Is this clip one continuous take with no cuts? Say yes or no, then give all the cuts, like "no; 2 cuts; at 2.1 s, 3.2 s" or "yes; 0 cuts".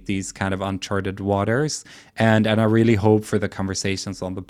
yes; 0 cuts